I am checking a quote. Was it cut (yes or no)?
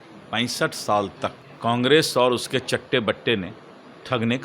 yes